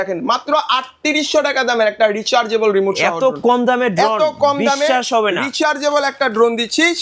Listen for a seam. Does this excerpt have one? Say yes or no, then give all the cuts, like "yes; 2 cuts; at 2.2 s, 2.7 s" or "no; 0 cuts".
no; 0 cuts